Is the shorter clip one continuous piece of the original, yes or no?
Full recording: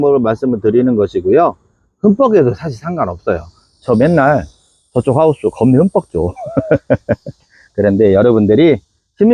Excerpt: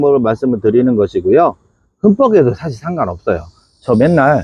yes